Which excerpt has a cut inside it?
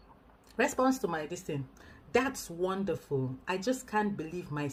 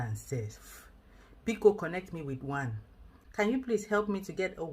second; 1 cut; at 3.2 s

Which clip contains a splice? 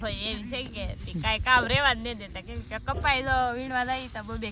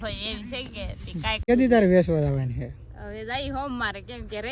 second; 1 cut; at 1.5 s

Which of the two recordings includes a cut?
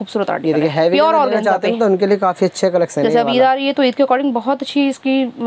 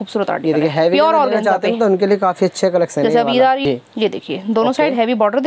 second; 1 cut; at 3.6 s

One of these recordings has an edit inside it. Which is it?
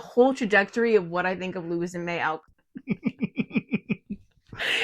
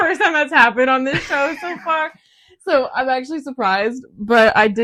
first; 1 cut; at 2.5 s

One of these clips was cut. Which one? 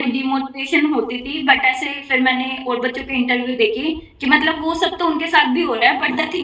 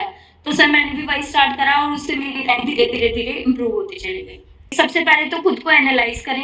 second; 1 cut; at 4.6 s

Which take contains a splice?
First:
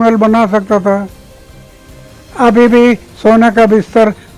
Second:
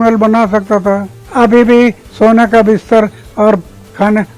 second; 1 cut; at 1.2 s

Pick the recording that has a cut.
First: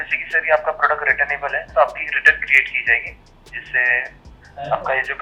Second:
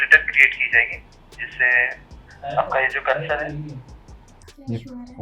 second; 1 cut; at 4.3 s

